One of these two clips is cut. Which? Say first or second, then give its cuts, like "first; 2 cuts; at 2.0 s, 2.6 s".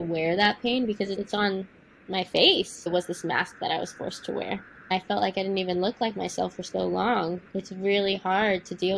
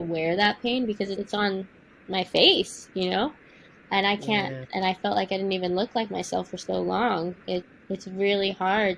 first; 3 cuts; at 2.9 s, 4.9 s, 7.4 s